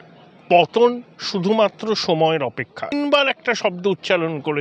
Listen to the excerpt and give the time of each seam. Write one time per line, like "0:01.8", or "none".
0:02.8